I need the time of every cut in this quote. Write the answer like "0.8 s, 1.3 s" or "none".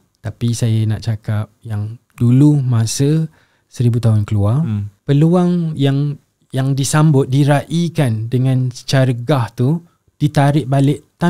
4.9 s